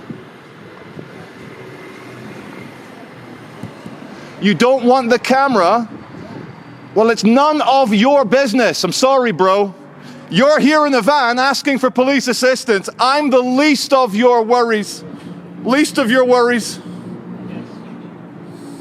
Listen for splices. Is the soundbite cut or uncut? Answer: uncut